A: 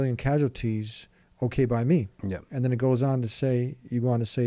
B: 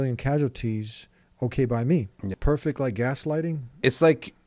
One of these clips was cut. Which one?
B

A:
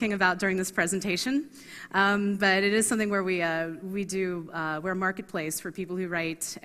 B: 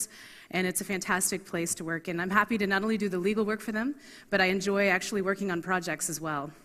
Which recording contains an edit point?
A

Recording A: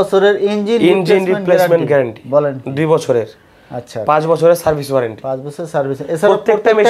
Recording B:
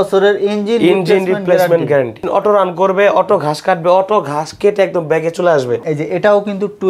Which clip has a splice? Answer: B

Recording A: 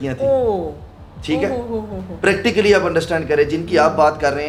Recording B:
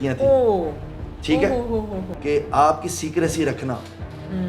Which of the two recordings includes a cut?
B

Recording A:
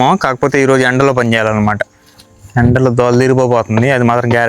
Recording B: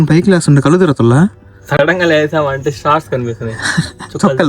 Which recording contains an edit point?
B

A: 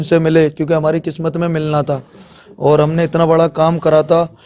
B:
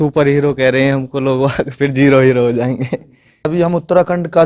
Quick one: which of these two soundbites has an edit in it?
B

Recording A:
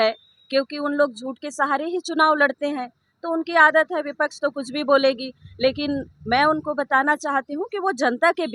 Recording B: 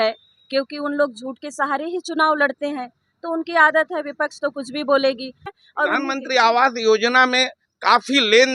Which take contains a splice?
B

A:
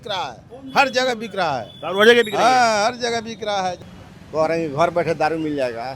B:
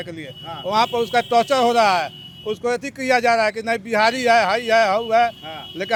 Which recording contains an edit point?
A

